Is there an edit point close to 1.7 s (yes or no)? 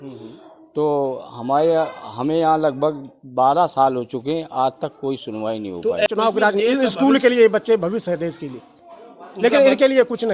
no